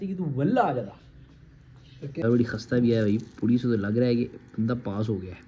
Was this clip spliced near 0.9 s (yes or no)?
no